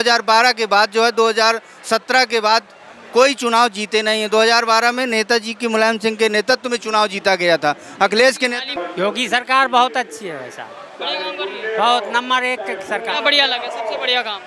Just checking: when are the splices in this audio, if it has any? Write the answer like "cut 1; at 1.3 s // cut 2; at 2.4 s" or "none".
cut 1; at 8.7 s

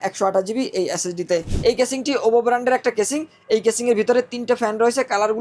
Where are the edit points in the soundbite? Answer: cut 1; at 1.5 s

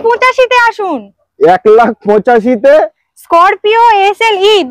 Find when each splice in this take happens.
none

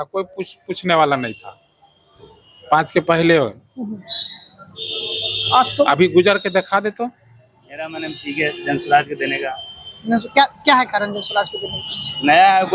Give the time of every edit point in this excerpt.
cut 1; at 7.7 s

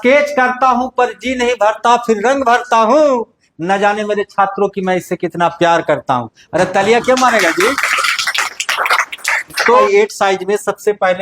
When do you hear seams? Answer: cut 1; at 9.8 s

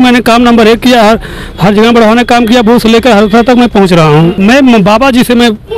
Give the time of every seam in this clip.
cut 1; at 4.4 s

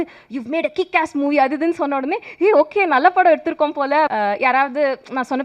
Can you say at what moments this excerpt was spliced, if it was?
cut 1; at 4.1 s

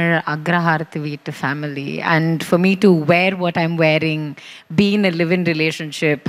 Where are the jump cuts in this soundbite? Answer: none

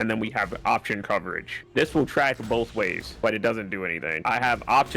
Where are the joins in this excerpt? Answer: cut 1; at 1.6 s // cut 2; at 3.0 s // cut 3; at 4.1 s

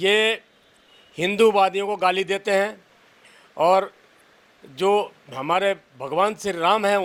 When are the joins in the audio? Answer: none

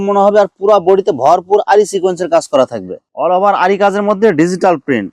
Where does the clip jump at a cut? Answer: cut 1; at 3.0 s

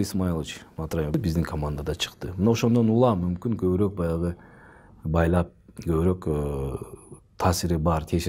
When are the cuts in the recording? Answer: cut 1; at 1.1 s

